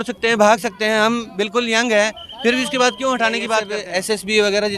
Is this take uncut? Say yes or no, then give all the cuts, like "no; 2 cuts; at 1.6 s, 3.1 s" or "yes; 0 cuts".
no; 1 cut; at 3.8 s